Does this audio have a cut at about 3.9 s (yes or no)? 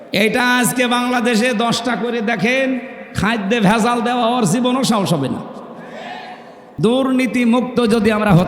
no